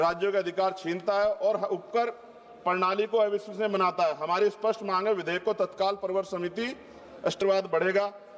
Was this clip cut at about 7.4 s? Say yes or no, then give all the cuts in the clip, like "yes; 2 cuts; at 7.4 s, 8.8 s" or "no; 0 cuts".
yes; 1 cut; at 7.4 s